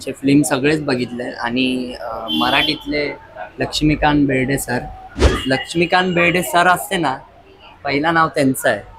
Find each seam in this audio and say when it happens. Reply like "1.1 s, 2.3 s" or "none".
5.3 s